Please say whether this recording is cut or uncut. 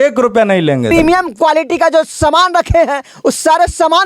cut